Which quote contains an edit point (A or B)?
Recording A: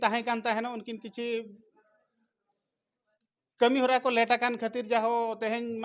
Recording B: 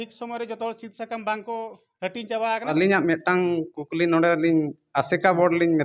B